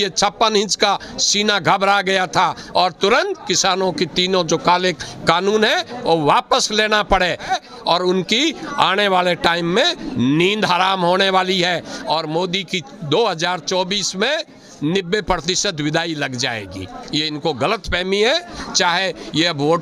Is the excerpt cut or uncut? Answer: uncut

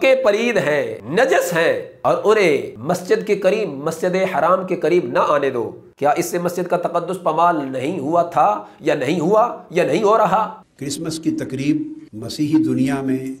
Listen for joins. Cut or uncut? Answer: cut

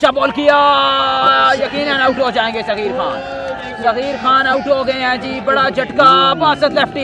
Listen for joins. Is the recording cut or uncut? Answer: uncut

